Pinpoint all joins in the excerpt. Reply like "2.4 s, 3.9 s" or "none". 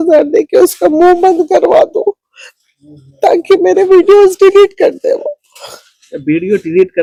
none